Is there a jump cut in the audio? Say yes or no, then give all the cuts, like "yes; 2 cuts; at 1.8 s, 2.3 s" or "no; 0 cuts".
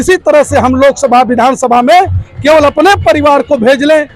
no; 0 cuts